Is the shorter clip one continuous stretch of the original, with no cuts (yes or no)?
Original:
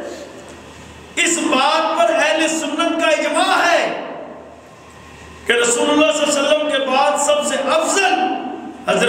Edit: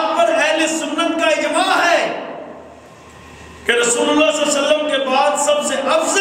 yes